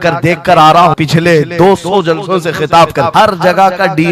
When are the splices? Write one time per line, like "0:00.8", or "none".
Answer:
0:01.0
0:03.1